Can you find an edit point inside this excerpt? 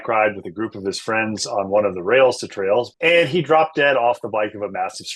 yes; 1 cut; at 2.9 s

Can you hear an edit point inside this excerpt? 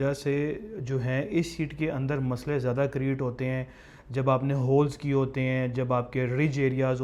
no; 0 cuts

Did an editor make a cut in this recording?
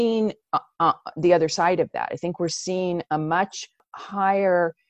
yes; 1 cut; at 3.9 s

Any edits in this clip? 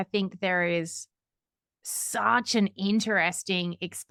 no; 0 cuts

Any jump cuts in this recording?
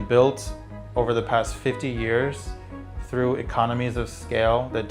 no; 0 cuts

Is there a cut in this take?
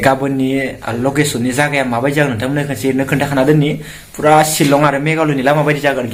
no; 0 cuts

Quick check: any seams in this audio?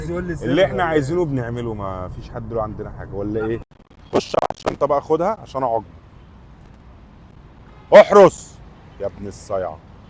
yes; 1 cut; at 3.7 s

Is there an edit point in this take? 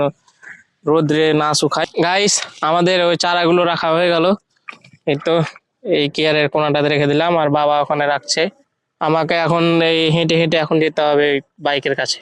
yes; 2 cuts; at 1.9 s, 8.6 s

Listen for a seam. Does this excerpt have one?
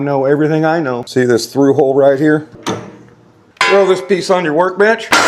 yes; 1 cut; at 1.0 s

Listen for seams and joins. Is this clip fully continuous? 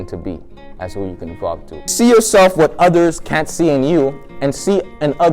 no; 1 cut; at 1.9 s

